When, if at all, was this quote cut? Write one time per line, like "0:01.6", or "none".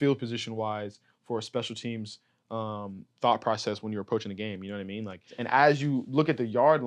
0:05.4

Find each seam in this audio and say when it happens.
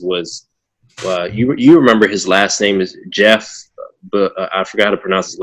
none

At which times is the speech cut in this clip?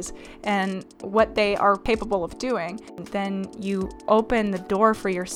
0:01.8
0:03.0

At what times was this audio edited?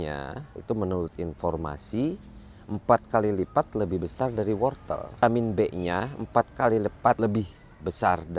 0:05.2
0:07.2

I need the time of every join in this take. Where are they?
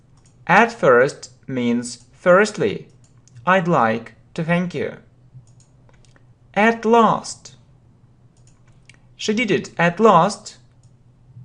none

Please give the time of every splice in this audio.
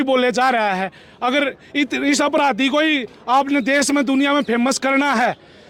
none

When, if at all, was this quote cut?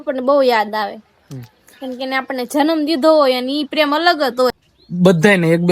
0:04.5

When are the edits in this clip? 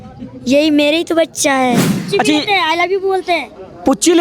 0:02.0

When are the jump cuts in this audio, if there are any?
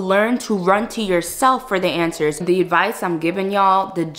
0:02.4

